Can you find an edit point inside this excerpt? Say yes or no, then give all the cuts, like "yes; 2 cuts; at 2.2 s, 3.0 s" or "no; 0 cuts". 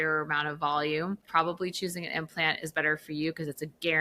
yes; 1 cut; at 1.2 s